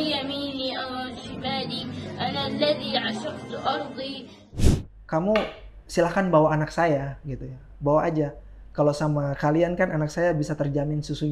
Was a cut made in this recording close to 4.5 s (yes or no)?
yes